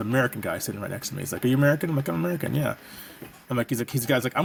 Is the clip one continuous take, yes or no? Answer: yes